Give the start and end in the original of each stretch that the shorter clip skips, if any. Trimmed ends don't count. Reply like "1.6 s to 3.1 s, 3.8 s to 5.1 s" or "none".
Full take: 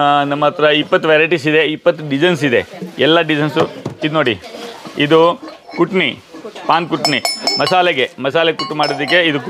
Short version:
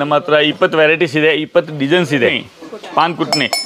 2.8 s to 6.2 s